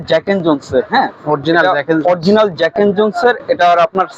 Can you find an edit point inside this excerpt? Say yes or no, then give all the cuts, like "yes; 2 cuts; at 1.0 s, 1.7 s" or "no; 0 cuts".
no; 0 cuts